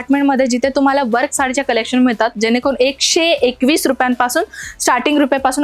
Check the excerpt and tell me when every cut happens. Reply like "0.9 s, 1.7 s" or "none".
none